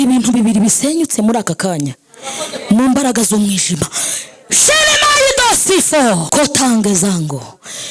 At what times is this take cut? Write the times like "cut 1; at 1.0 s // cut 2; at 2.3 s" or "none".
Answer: cut 1; at 6.2 s